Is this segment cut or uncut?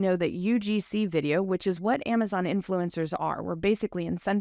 uncut